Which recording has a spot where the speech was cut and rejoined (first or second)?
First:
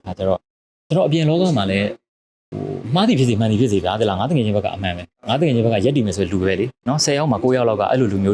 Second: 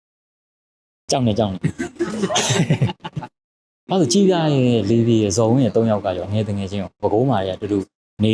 second